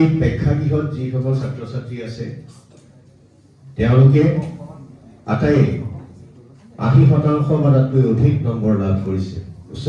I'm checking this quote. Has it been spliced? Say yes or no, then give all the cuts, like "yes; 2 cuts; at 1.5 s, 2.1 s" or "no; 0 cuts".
no; 0 cuts